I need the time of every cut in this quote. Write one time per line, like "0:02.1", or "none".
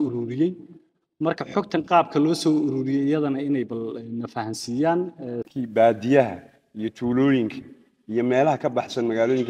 0:05.5